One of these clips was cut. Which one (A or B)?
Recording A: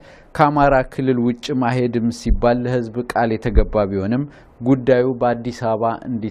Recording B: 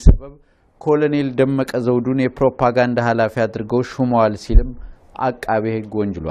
B